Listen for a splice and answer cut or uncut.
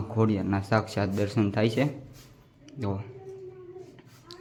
uncut